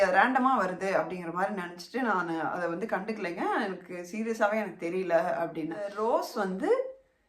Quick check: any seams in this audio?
yes; 1 cut; at 6.0 s

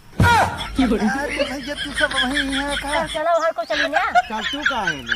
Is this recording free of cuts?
no; 1 cut; at 3.1 s

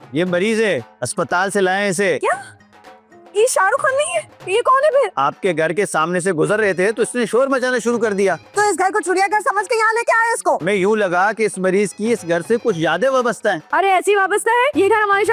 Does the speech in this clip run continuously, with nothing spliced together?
yes; 0 cuts

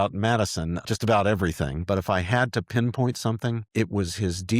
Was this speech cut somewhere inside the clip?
yes; 3 cuts; at 0.8 s, 1.8 s, 3.6 s

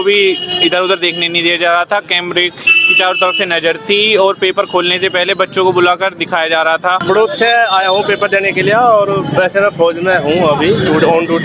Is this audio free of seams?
no; 1 cut; at 7.0 s

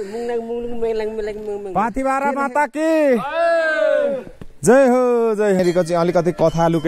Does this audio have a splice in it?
yes; 2 cuts; at 1.7 s, 5.6 s

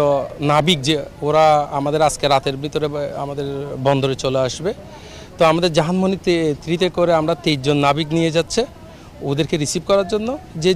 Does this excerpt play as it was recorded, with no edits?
yes; 0 cuts

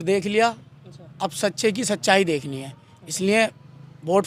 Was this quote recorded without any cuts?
yes; 0 cuts

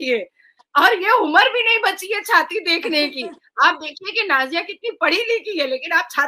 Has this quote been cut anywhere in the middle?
no; 0 cuts

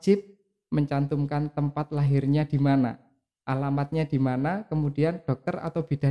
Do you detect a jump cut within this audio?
no; 0 cuts

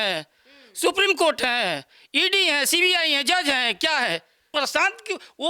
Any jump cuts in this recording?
yes; 1 cut; at 4.5 s

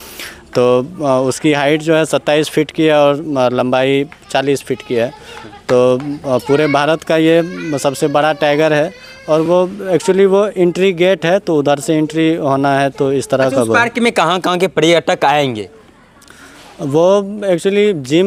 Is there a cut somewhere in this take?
no; 0 cuts

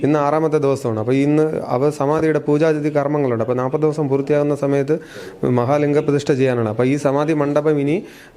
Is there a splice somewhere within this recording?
no; 0 cuts

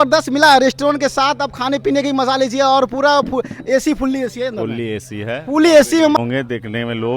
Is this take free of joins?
no; 1 cut; at 6.2 s

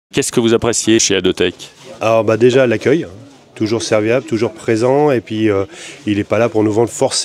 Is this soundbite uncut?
no; 1 cut; at 1.0 s

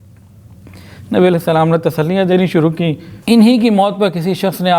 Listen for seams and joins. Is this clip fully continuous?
no; 1 cut; at 3.1 s

